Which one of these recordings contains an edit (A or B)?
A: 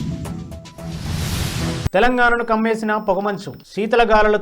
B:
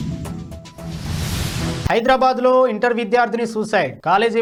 A